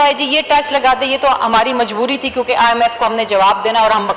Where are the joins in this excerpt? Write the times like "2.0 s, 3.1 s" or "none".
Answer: none